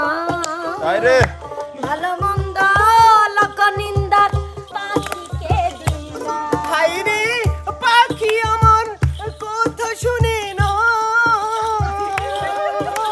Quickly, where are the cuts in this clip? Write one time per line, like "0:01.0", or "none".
0:04.6